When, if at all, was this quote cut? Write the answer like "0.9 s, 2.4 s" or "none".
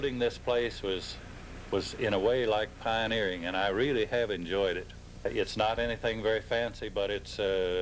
5.3 s